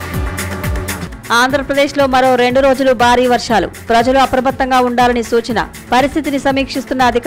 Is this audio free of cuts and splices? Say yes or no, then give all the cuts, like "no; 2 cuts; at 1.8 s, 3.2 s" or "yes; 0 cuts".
no; 1 cut; at 1.0 s